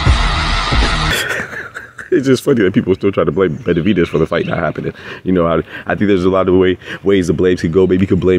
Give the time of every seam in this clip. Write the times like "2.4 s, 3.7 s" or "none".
1.1 s